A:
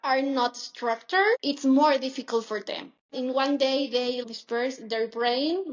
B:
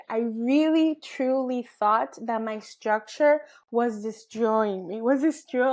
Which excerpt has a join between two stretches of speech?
A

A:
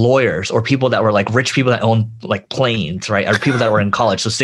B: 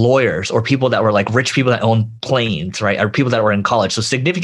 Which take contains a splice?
B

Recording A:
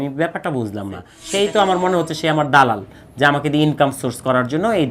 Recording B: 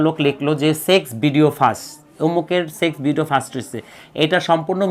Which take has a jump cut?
A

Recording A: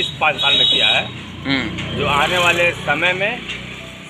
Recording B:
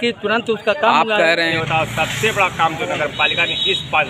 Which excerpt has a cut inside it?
B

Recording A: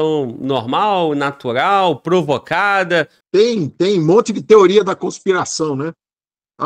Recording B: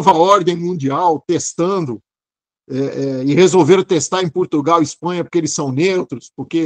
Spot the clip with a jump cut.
A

